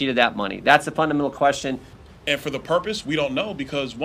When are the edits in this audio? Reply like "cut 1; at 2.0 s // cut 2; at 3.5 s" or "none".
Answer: cut 1; at 1.9 s